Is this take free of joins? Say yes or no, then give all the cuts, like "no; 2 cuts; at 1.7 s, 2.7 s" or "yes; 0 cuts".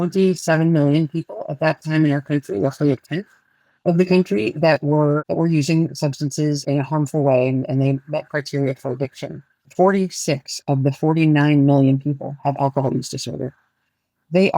no; 2 cuts; at 6.6 s, 9.7 s